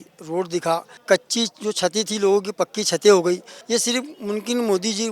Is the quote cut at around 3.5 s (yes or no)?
yes